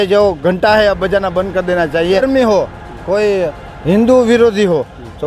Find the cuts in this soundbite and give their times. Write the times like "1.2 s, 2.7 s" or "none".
2.2 s